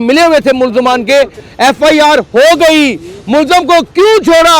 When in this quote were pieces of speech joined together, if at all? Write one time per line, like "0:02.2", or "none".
0:01.4